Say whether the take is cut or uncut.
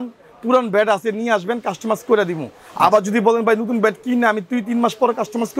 uncut